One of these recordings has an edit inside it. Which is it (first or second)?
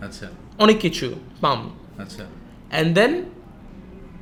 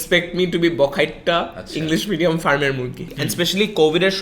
second